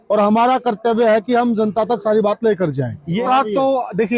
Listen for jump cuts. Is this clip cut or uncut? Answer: cut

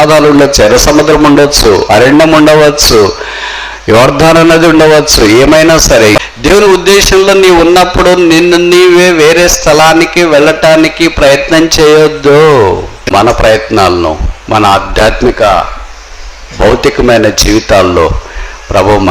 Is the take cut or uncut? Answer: cut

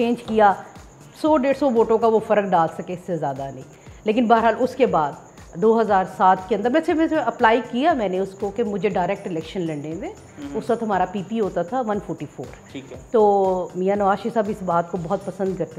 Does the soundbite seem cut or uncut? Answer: uncut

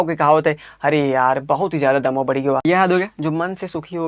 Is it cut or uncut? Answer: cut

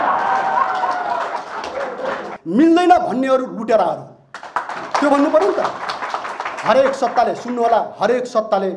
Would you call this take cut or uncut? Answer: cut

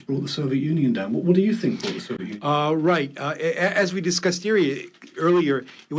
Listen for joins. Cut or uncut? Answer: uncut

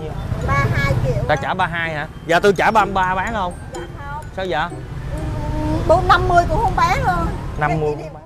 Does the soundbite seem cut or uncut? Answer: uncut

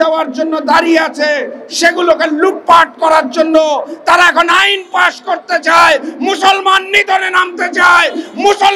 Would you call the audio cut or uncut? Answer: uncut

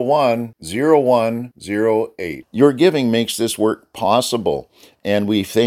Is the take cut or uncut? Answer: uncut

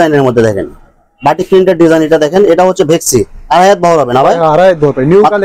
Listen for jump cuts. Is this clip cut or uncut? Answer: uncut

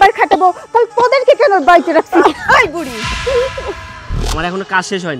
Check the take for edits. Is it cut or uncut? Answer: cut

